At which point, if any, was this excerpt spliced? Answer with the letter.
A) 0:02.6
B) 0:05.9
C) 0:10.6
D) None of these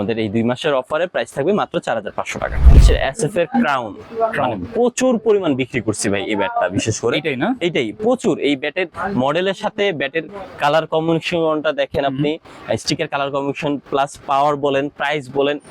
A